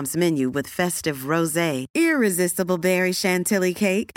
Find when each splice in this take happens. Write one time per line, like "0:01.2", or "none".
none